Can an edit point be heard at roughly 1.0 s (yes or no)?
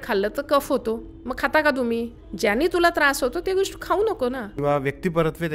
no